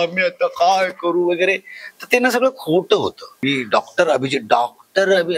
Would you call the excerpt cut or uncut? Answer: cut